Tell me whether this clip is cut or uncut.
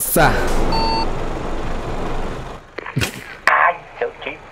uncut